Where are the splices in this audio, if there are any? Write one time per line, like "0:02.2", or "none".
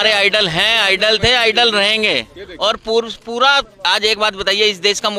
none